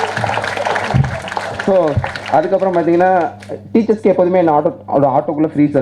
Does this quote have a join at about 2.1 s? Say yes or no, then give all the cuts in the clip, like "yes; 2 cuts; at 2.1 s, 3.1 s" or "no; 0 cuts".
no; 0 cuts